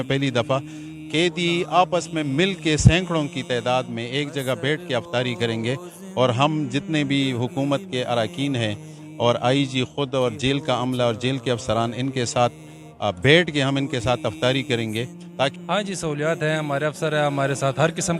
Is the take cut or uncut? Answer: cut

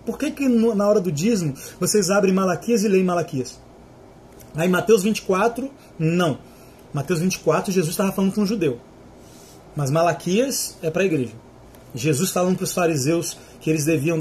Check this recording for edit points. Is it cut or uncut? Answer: uncut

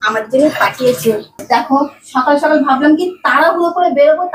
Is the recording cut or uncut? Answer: cut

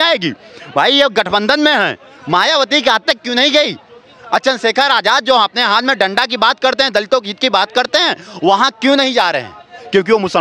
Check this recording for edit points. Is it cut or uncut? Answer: uncut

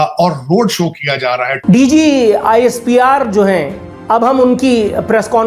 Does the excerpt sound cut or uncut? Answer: cut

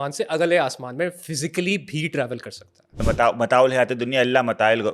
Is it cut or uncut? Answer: cut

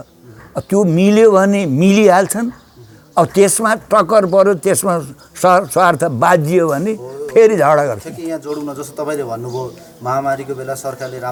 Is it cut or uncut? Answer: uncut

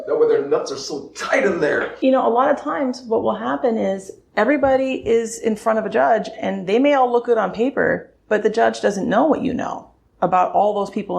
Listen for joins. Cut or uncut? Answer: cut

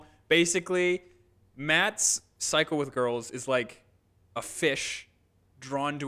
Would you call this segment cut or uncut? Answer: uncut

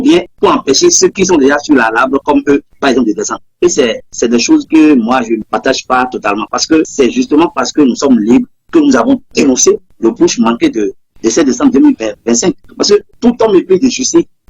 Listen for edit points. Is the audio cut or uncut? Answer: uncut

